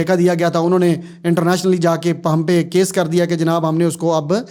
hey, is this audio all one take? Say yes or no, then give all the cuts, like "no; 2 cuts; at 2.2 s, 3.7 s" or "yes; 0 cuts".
yes; 0 cuts